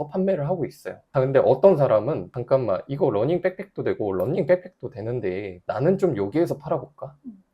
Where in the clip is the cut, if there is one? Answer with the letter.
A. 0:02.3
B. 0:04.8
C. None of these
A